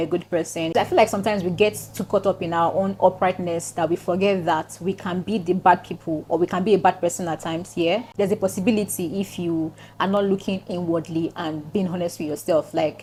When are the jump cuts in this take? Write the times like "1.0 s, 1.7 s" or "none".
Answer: none